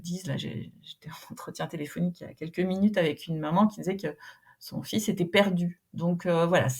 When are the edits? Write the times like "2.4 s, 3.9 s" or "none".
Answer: none